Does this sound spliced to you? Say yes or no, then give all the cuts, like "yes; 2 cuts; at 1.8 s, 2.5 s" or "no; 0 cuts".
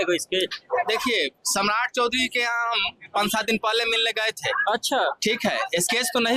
no; 0 cuts